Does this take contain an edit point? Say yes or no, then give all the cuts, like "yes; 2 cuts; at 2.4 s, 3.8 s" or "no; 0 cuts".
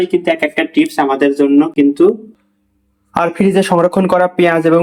no; 0 cuts